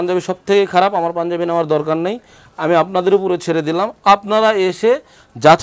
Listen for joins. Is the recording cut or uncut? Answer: uncut